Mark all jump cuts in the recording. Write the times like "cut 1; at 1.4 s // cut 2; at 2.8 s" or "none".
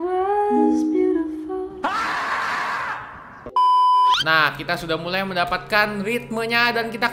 cut 1; at 1.7 s // cut 2; at 4.1 s